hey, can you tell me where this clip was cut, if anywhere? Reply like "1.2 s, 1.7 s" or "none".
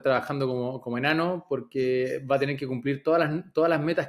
none